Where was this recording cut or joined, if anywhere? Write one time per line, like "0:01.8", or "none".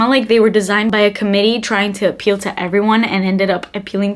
none